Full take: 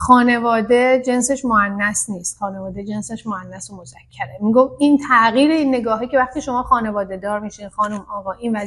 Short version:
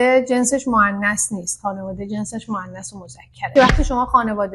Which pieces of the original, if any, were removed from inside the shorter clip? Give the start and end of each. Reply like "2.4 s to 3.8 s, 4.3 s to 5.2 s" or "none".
4.2 s to 6.0 s